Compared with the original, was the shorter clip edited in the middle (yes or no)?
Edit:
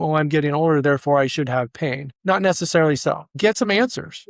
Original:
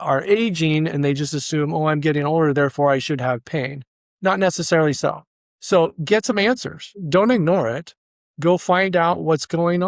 yes